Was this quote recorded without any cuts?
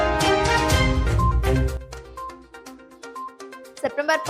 no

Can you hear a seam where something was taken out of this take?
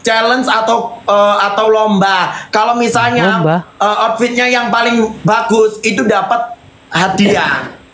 no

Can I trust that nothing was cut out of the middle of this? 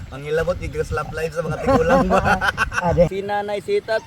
no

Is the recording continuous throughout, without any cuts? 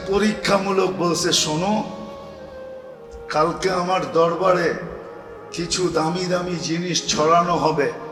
yes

